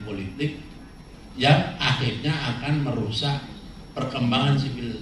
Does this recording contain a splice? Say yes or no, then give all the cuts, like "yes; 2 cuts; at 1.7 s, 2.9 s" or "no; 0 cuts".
no; 0 cuts